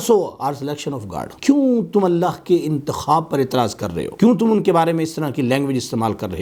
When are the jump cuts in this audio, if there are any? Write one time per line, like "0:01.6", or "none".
none